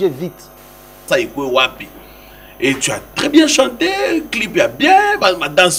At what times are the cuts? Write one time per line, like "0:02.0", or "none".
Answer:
0:01.0